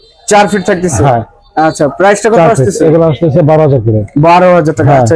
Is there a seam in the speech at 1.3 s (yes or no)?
no